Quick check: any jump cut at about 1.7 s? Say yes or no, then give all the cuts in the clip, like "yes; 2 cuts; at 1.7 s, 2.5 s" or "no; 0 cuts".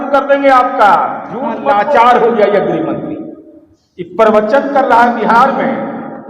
yes; 1 cut; at 1.7 s